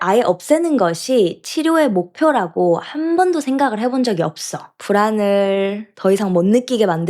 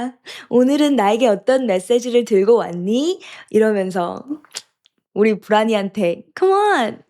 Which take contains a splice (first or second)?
first